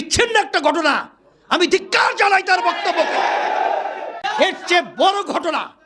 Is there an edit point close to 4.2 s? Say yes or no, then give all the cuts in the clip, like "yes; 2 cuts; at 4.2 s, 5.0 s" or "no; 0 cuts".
yes; 1 cut; at 4.2 s